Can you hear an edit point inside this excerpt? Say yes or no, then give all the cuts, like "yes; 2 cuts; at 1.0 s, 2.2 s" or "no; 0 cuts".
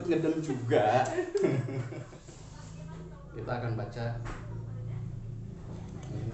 yes; 1 cut; at 1.9 s